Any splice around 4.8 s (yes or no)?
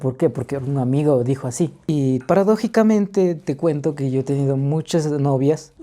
no